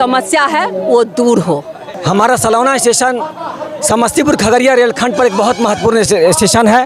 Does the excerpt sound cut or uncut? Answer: cut